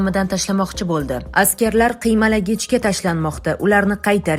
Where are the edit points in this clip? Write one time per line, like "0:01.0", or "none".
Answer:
0:01.2